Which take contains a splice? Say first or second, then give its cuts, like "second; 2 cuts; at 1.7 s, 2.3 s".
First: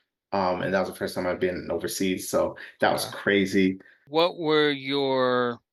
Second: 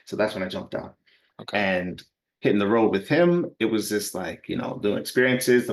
first; 1 cut; at 4.0 s